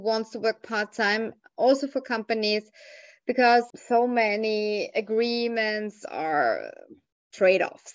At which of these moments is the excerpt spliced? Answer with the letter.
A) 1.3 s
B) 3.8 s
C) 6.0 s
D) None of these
B